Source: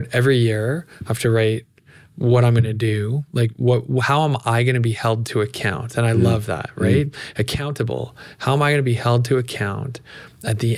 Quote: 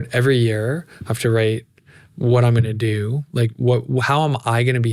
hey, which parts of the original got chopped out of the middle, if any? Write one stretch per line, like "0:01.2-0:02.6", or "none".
none

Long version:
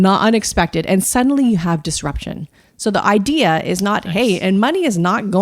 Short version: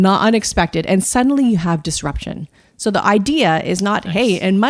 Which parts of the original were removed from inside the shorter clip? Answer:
none

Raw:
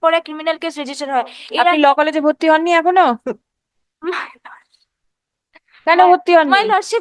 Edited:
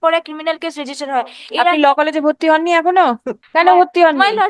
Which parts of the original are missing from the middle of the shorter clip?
0:03.3-0:05.7

